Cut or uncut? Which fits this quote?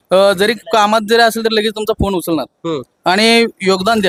uncut